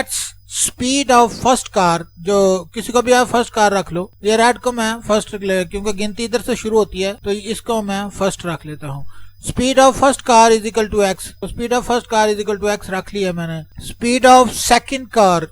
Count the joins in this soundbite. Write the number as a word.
one